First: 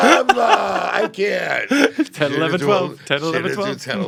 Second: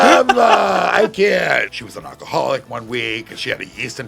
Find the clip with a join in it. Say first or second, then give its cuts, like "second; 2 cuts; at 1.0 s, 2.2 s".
second; 1 cut; at 1.6 s